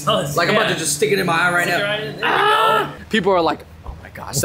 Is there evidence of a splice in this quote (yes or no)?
yes